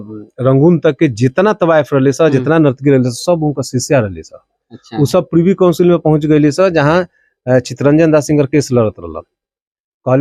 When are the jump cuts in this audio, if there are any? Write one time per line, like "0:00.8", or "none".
none